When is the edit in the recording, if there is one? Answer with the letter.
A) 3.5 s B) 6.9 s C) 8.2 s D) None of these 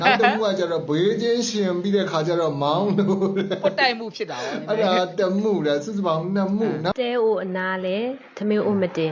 B